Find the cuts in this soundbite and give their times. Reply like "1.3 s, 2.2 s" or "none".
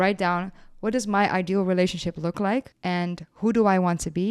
2.7 s